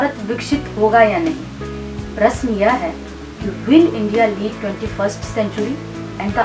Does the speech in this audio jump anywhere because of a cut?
no; 0 cuts

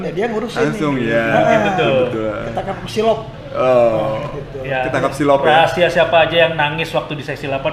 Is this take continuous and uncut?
yes; 0 cuts

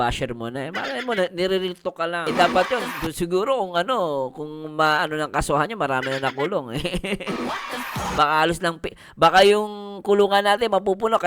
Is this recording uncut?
no; 1 cut; at 2.2 s

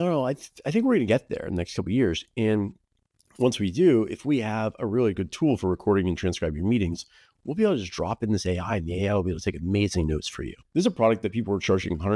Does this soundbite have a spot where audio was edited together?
yes; 1 cut; at 10.5 s

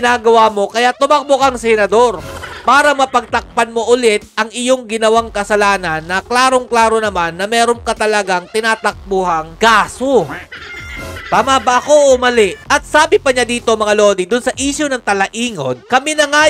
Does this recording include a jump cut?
no; 0 cuts

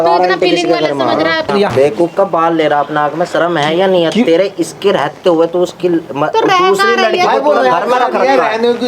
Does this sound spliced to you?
yes; 1 cut; at 1.5 s

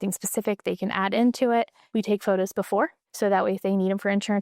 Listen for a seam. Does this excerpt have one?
yes; 2 cuts; at 1.8 s, 3.0 s

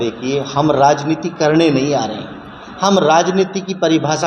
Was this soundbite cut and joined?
no; 0 cuts

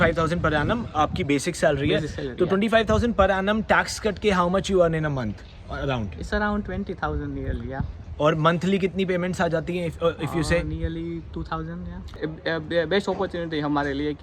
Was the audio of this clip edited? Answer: yes; 1 cut; at 12.1 s

